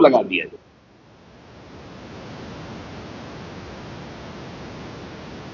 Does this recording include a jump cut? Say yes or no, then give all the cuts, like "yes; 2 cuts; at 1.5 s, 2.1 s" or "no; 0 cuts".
no; 0 cuts